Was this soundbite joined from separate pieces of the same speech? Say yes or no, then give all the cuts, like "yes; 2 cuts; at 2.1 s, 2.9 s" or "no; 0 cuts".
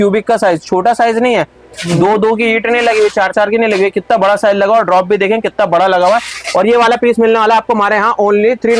no; 0 cuts